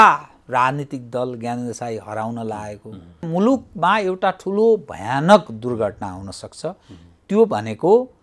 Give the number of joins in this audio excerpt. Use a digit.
1